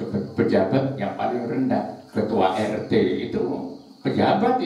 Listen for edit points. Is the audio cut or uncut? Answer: uncut